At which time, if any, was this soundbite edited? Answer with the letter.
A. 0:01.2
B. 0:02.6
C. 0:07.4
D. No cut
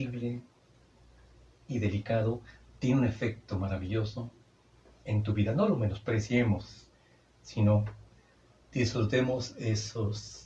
D